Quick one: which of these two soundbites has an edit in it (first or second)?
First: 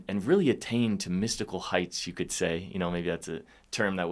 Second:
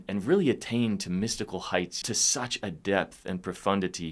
second